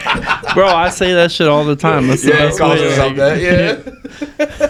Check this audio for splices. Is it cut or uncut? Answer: uncut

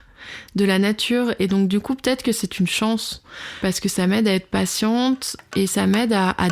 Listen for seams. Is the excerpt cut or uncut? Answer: cut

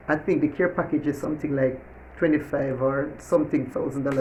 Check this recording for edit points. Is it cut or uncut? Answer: uncut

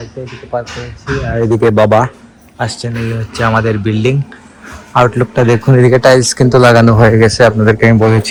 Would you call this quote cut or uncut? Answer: uncut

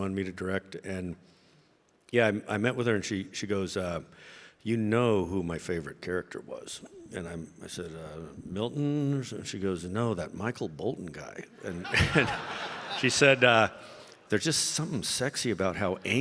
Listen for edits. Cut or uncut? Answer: uncut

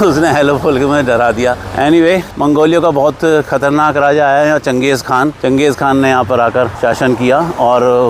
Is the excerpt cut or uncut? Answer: uncut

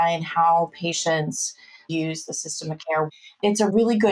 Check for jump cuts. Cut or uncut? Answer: cut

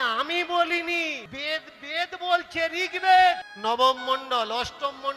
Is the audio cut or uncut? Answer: cut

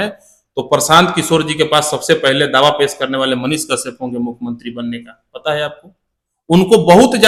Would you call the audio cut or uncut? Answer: uncut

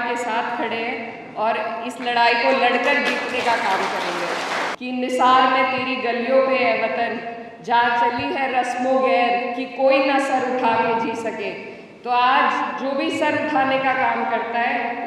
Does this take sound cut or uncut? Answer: cut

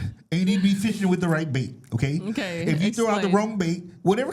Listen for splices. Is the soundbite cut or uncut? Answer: uncut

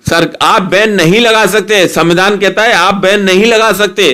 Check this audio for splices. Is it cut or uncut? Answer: uncut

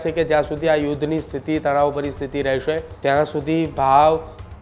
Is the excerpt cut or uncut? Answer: cut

